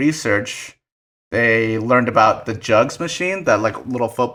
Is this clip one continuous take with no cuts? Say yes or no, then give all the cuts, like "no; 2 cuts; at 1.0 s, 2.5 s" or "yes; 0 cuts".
yes; 0 cuts